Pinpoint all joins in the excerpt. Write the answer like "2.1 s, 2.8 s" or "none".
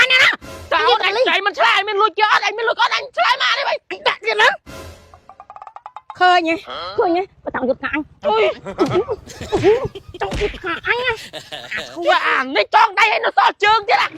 none

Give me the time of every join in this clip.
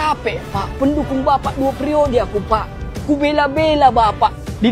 none

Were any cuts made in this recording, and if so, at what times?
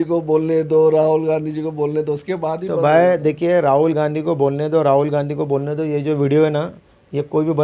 none

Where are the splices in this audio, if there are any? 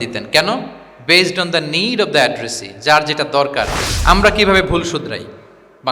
3.8 s

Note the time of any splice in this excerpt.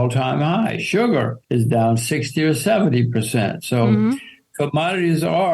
1.4 s

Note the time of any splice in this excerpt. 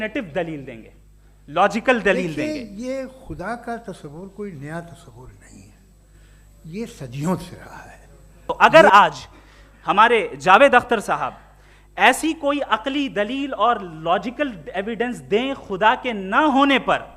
2.3 s, 8.3 s

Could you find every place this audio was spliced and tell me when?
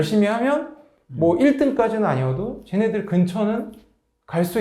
none

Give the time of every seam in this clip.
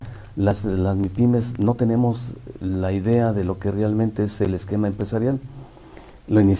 none

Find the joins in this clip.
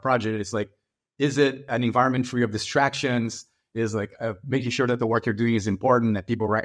1.7 s

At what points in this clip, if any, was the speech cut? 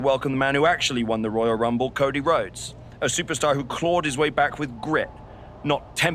none

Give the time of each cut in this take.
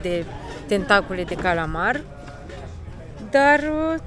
none

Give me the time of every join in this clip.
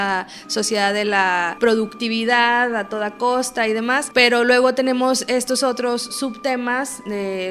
1.5 s, 4.0 s

